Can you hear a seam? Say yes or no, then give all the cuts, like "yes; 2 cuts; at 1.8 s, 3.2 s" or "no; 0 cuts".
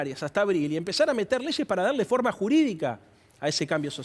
no; 0 cuts